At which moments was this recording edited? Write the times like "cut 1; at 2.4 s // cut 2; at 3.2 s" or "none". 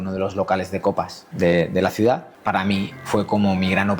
cut 1; at 1.2 s // cut 2; at 2.7 s